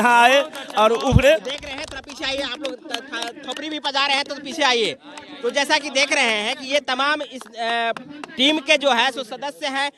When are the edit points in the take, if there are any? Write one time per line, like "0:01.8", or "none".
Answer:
none